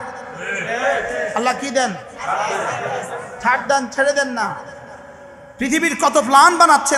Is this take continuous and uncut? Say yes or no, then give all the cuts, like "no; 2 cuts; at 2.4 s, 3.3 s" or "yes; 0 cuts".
yes; 0 cuts